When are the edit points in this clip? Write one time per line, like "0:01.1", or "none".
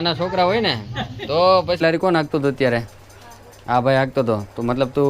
0:01.8